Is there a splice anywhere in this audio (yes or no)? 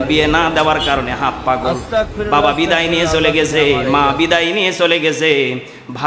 no